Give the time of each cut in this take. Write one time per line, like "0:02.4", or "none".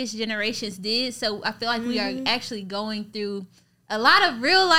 none